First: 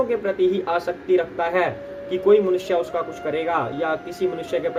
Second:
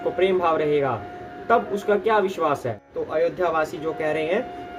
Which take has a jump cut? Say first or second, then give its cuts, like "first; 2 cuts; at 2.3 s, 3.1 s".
second; 1 cut; at 2.8 s